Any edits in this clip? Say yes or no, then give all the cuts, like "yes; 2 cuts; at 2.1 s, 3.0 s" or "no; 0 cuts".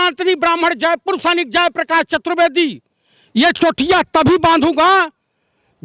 no; 0 cuts